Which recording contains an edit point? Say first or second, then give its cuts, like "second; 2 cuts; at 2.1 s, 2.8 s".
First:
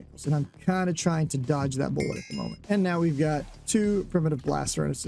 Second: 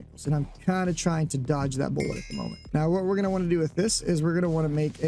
first; 1 cut; at 2.5 s